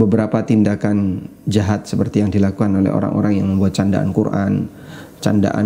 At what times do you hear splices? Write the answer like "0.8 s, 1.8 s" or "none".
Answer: none